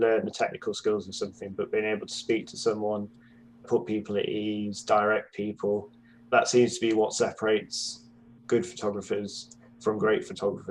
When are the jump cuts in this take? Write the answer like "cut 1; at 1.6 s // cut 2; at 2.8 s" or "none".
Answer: cut 1; at 6.3 s